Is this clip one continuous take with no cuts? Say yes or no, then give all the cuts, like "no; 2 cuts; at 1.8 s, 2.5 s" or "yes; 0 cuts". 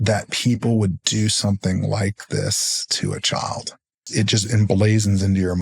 no; 1 cut; at 4.0 s